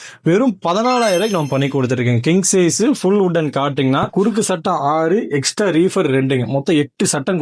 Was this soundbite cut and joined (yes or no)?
yes